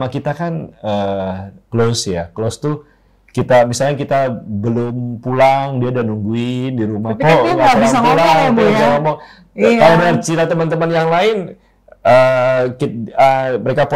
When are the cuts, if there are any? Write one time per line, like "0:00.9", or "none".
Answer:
none